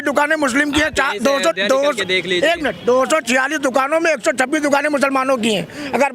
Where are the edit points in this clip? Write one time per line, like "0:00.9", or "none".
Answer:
none